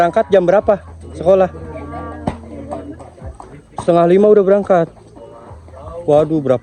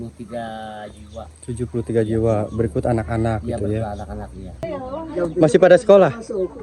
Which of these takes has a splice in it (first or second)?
second